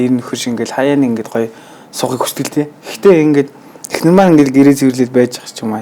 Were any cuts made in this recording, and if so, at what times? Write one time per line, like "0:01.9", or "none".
none